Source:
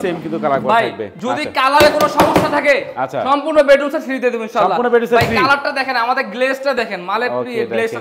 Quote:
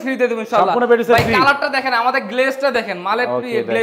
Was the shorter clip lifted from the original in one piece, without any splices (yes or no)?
yes